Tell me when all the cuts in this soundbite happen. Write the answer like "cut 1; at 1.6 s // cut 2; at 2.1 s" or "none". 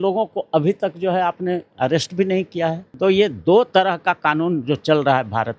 cut 1; at 2.9 s